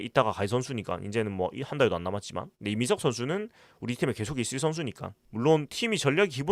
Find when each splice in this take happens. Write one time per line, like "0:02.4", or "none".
0:05.2